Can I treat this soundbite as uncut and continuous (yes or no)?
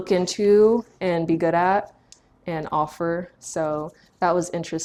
yes